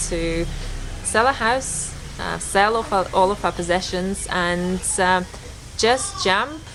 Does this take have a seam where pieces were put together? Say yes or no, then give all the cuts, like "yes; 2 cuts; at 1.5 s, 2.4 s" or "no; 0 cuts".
no; 0 cuts